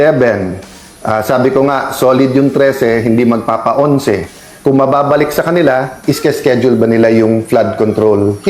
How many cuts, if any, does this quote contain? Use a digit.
1